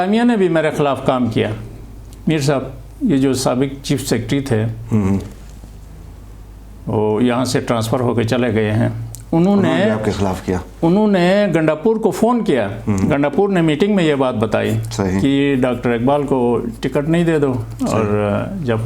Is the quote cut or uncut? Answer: uncut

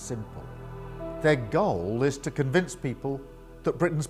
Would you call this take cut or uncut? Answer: uncut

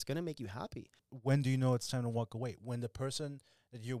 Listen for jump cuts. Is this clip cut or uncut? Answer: cut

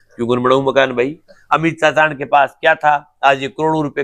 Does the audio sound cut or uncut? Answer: cut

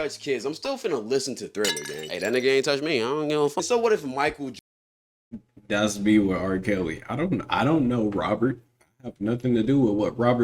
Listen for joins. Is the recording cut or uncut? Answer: uncut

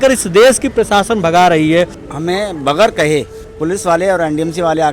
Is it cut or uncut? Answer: cut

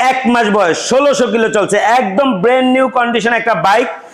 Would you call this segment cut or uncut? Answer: uncut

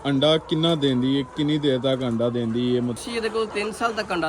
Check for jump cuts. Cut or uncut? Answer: cut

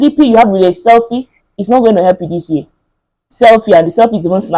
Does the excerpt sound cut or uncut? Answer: uncut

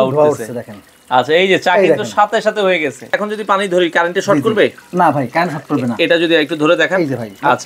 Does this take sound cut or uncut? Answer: cut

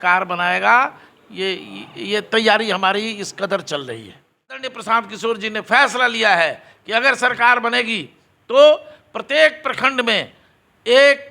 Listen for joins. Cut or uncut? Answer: cut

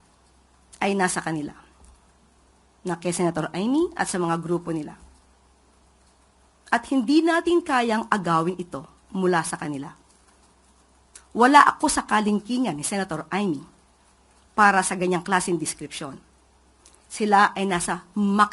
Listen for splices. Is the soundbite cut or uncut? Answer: uncut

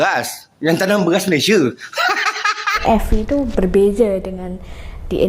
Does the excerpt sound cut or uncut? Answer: cut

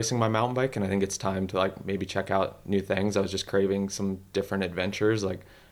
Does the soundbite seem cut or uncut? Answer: uncut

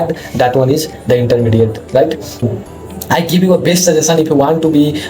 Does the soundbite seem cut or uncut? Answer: cut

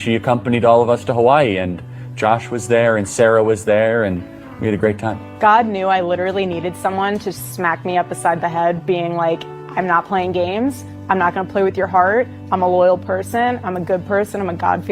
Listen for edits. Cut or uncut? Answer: uncut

